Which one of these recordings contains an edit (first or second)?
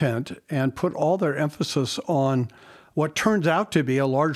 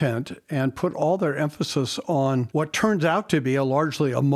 second